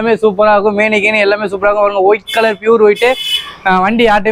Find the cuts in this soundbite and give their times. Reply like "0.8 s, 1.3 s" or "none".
none